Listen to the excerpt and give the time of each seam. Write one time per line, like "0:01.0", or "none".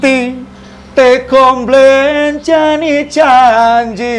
none